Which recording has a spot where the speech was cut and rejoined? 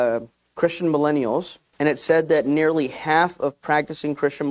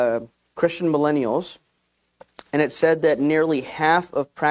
first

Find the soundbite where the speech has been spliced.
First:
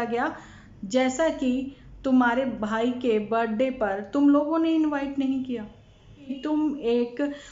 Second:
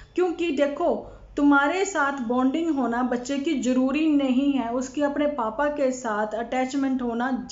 first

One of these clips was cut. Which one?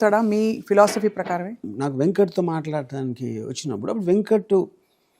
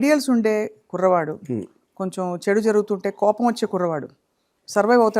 first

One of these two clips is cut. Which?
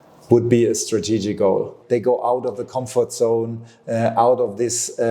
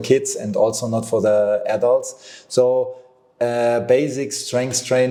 first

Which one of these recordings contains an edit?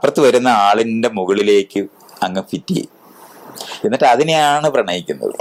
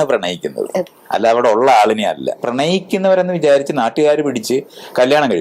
second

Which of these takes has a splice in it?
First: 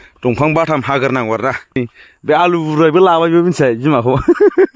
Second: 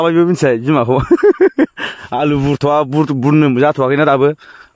first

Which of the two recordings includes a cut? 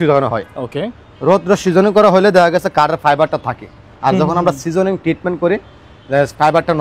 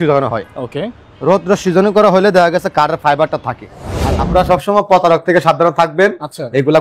second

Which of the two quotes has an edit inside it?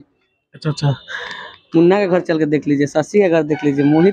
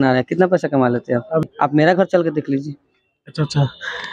second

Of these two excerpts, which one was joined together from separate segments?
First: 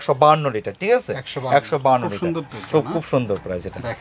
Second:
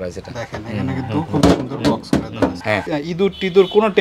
second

